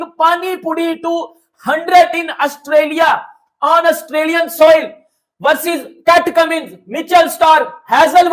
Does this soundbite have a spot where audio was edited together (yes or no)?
no